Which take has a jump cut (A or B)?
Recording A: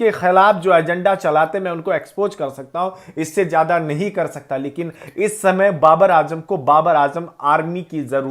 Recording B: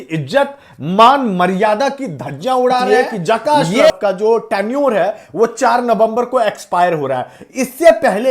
B